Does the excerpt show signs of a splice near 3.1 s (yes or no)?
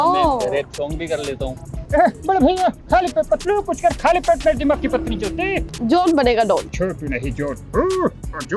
no